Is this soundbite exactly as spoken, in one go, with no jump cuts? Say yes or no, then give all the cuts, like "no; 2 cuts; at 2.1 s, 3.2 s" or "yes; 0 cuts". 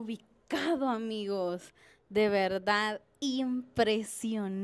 yes; 0 cuts